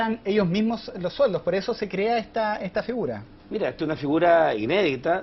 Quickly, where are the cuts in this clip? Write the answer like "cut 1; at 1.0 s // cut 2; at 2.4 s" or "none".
cut 1; at 2.5 s